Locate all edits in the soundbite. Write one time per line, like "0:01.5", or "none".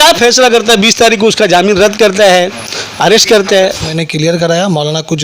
0:03.9